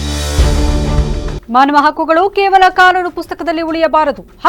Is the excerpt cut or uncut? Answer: uncut